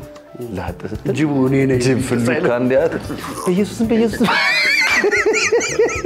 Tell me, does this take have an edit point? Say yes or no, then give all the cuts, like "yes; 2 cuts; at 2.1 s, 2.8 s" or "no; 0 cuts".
no; 0 cuts